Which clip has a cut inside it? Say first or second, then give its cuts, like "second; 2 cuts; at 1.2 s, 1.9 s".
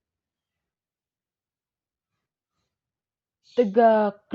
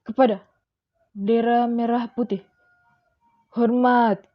first; 1 cut; at 3.2 s